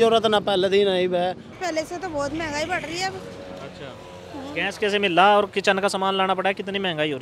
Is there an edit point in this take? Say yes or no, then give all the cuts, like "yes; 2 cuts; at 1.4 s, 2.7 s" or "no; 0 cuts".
yes; 1 cut; at 1.5 s